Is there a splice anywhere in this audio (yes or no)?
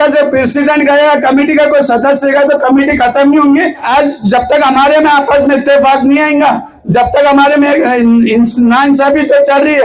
yes